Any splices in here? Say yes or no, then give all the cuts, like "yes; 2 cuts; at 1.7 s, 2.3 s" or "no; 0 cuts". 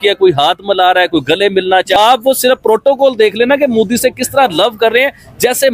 yes; 1 cut; at 2.0 s